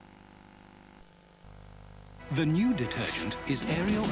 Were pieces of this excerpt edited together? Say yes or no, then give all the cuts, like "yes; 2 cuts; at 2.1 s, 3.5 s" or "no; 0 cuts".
yes; 1 cut; at 2.8 s